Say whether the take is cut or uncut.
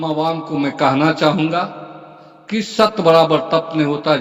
uncut